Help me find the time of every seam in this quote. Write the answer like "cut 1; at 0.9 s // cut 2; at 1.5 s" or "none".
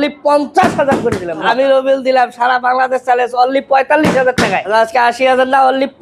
cut 1; at 1.4 s // cut 2; at 4.6 s